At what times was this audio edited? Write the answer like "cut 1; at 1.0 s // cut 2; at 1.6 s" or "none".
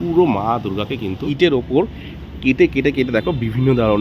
cut 1; at 1.3 s